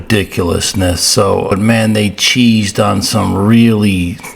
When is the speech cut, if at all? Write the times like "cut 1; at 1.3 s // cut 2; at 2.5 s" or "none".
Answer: cut 1; at 1.5 s